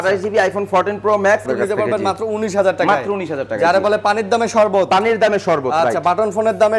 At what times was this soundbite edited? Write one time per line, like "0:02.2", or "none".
0:01.4